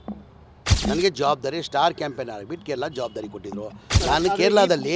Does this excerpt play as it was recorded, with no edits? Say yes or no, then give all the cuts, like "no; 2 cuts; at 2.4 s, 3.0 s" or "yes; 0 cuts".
no; 1 cut; at 3.9 s